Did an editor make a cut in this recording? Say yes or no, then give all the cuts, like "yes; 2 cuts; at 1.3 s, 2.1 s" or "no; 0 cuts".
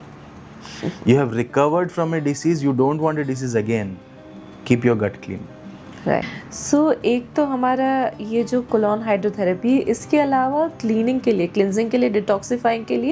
no; 0 cuts